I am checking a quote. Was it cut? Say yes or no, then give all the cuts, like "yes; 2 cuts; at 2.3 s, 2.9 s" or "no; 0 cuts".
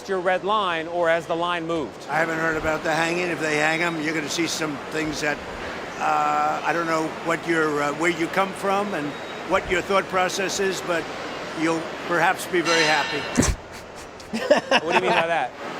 no; 0 cuts